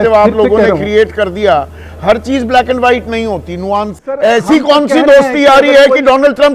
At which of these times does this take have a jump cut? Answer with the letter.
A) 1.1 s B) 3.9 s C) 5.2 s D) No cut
B